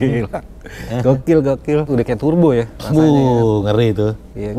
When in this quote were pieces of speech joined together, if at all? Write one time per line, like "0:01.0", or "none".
0:01.9